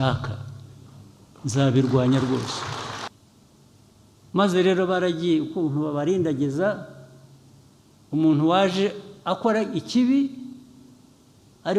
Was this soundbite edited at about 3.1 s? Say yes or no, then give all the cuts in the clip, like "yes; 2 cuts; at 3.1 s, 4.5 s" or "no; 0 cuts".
yes; 1 cut; at 3.1 s